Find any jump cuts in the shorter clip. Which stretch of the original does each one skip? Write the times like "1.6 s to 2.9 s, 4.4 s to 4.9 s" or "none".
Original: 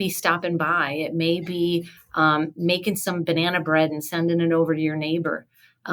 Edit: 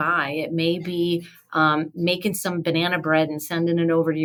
none